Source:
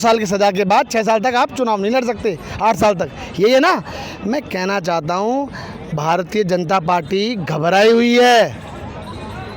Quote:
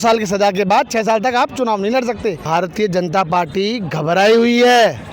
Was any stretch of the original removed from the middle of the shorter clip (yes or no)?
yes